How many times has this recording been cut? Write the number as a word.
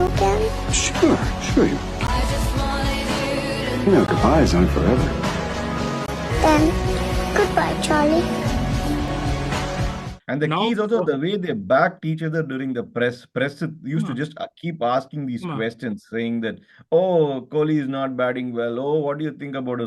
zero